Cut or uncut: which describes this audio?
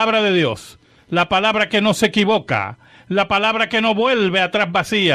uncut